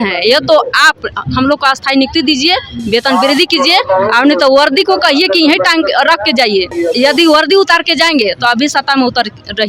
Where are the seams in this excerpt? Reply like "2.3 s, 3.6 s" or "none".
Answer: 6.7 s

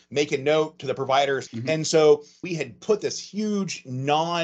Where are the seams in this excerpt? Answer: 1.4 s, 2.4 s

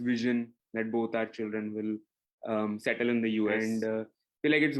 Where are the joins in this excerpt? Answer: 3.6 s

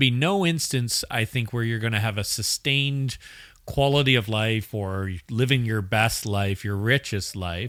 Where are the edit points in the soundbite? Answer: none

